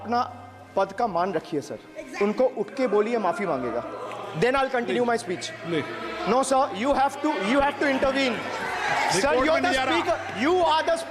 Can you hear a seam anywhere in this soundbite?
no; 0 cuts

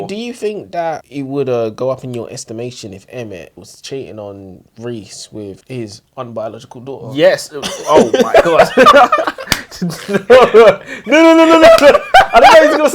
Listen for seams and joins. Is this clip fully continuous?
no; 3 cuts; at 1.0 s, 3.6 s, 5.6 s

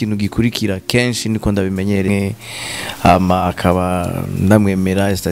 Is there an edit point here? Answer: yes; 1 cut; at 2.1 s

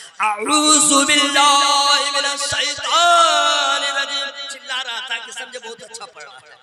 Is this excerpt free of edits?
yes; 0 cuts

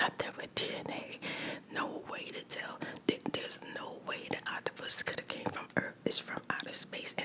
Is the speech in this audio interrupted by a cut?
no; 0 cuts

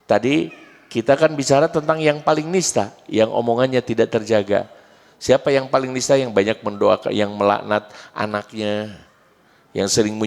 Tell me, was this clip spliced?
no; 0 cuts

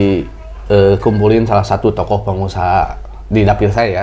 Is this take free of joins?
yes; 0 cuts

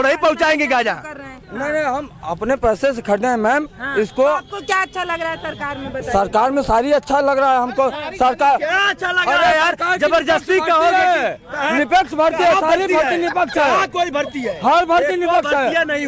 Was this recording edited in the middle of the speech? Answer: no; 0 cuts

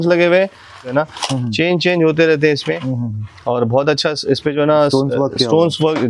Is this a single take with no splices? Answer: no; 1 cut; at 0.9 s

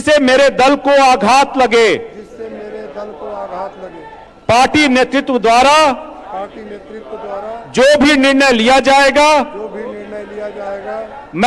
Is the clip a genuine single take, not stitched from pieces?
no; 1 cut; at 4.2 s

